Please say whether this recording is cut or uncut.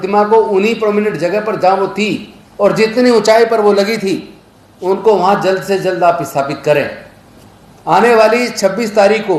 uncut